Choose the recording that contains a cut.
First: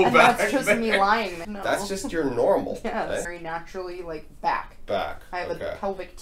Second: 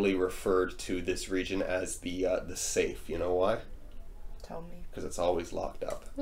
first; 2 cuts; at 1.4 s, 3.4 s

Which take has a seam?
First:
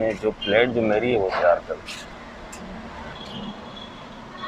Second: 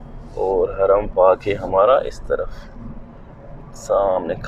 first; 1 cut; at 3.2 s

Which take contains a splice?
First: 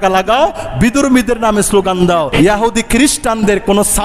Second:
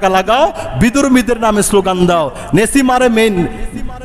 first; 1 cut; at 2.3 s

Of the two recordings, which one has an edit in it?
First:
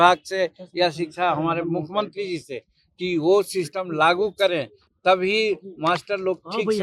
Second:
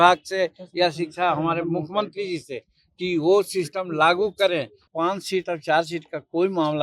second; 1 cut; at 4.9 s

